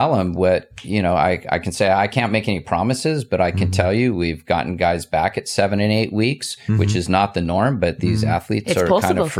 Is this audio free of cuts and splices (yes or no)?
yes